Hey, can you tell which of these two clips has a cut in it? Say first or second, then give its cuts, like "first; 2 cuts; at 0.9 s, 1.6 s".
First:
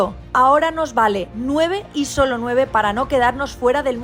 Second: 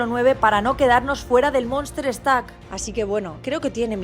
second; 1 cut; at 2.9 s